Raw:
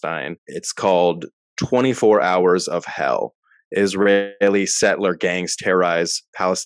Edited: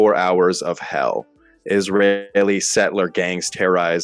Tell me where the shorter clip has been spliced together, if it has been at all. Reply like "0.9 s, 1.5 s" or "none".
none